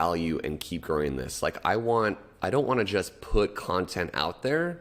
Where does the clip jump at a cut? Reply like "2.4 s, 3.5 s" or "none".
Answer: none